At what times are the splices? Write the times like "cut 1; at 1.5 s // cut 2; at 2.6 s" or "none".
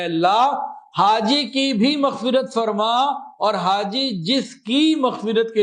none